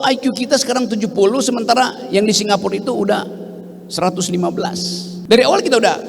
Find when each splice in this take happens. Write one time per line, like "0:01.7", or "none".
0:05.1